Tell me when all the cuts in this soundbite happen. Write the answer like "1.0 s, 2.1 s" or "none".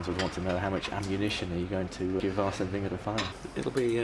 2.2 s